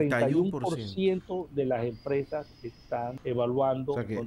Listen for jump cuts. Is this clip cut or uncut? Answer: cut